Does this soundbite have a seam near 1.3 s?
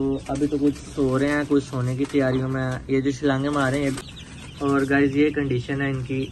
no; 1 cut; at 4.0 s

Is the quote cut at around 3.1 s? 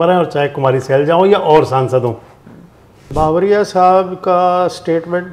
yes; 1 cut; at 3.1 s

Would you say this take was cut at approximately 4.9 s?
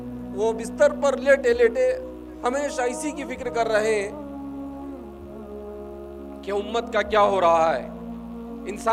no; 0 cuts

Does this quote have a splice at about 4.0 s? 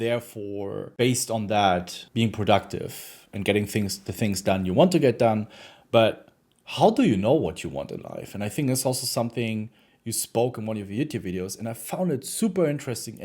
no; 2 cuts; at 0.9 s, 2.0 s

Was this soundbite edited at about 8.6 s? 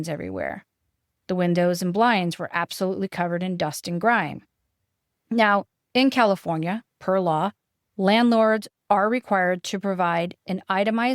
no; 1 cut; at 5.8 s

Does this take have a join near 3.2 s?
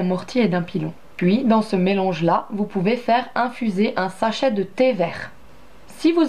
no; 1 cut; at 1.4 s

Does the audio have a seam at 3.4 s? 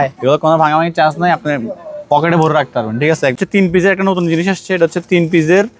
yes; 1 cut; at 3.4 s

